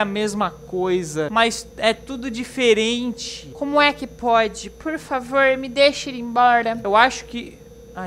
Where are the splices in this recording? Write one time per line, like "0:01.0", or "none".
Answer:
none